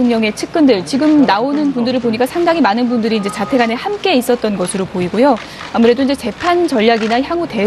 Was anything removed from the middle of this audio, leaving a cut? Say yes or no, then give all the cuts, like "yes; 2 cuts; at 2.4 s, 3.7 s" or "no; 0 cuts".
yes; 1 cut; at 2.5 s